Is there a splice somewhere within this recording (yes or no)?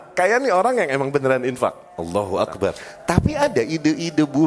yes